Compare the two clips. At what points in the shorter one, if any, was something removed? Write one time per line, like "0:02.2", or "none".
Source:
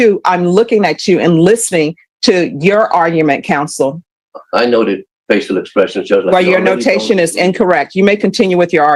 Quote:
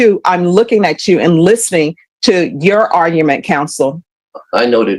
none